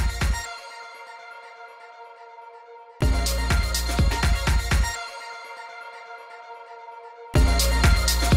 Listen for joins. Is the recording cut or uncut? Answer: cut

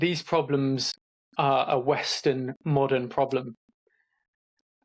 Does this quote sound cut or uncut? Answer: uncut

